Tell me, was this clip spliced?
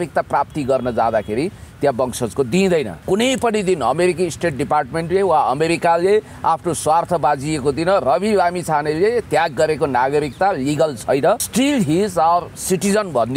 yes; 2 cuts; at 3.0 s, 11.5 s

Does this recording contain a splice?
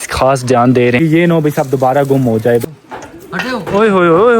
yes; 2 cuts; at 1.0 s, 2.6 s

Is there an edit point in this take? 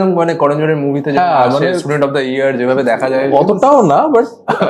no; 0 cuts

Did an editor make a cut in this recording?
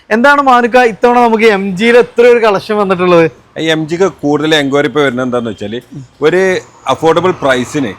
no; 0 cuts

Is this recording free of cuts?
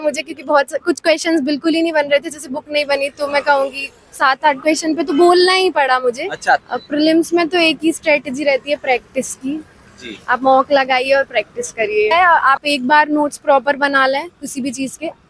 no; 2 cuts; at 6.7 s, 12.1 s

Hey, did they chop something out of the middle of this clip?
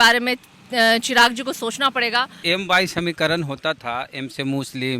yes; 1 cut; at 2.4 s

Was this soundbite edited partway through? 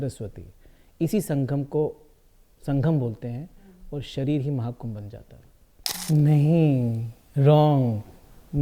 yes; 1 cut; at 5.9 s

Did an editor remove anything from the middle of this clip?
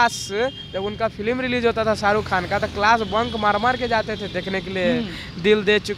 no; 0 cuts

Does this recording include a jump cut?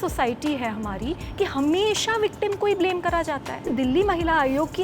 yes; 1 cut; at 3.7 s

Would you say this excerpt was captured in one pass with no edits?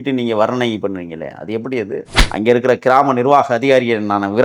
no; 1 cut; at 2.1 s

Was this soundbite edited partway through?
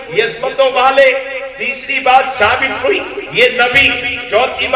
no; 0 cuts

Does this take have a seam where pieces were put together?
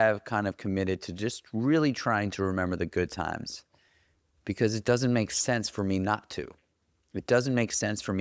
no; 0 cuts

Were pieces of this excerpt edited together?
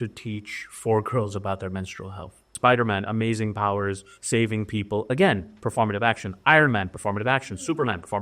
yes; 1 cut; at 2.5 s

